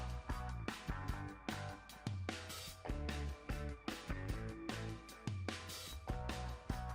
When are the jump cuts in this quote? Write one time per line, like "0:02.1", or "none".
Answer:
none